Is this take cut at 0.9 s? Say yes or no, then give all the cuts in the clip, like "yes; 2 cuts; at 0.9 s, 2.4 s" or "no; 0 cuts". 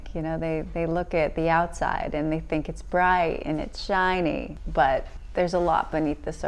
no; 2 cuts; at 4.6 s, 5.2 s